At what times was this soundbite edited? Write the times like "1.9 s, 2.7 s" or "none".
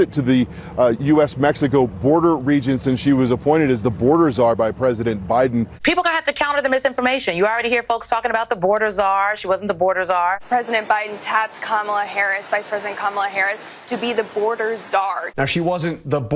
5.7 s, 10.4 s, 15.3 s